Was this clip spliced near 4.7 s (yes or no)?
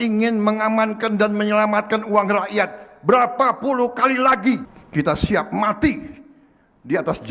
yes